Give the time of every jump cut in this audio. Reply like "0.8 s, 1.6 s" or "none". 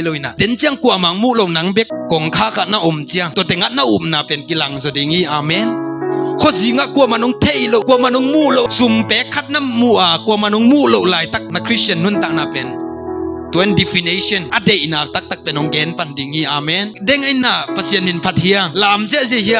none